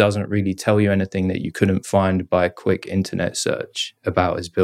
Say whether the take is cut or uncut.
uncut